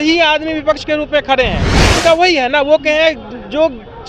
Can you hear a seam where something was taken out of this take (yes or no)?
yes